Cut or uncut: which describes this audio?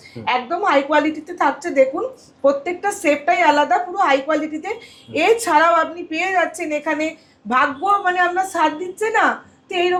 uncut